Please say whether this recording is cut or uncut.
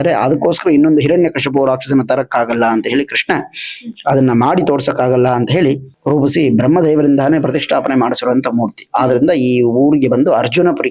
cut